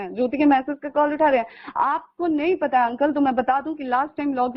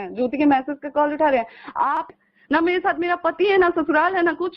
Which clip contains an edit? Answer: second; 1 cut; at 2.1 s

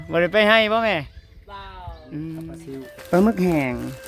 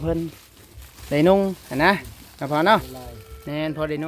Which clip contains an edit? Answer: first; 1 cut; at 2.9 s

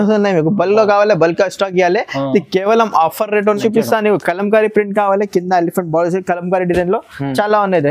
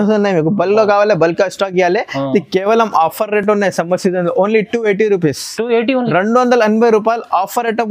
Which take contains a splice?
first; 1 cut; at 3.5 s

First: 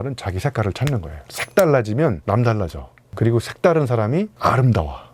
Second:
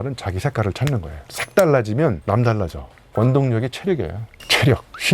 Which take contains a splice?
second; 1 cut; at 3.0 s

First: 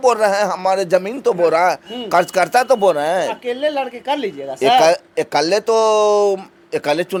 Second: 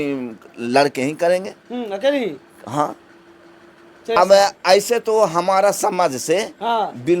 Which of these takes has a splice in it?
second; 1 cut; at 4.2 s

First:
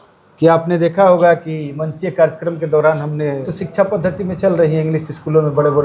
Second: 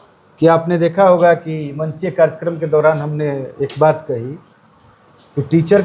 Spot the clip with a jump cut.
first; 1 cut; at 3.5 s

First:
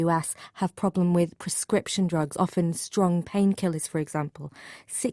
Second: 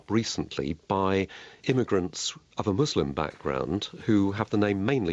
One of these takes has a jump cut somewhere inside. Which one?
second; 1 cut; at 1.6 s

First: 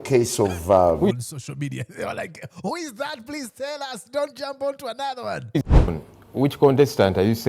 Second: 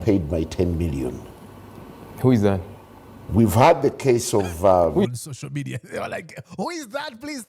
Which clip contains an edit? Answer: first; 1 cut; at 5.6 s

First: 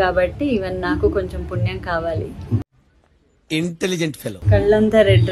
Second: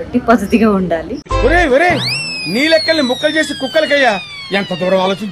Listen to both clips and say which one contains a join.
first; 1 cut; at 4.4 s

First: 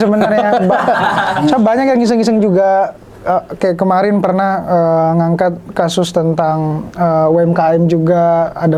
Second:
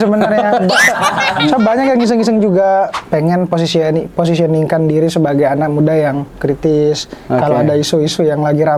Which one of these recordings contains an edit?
second; 1 cut; at 3.0 s

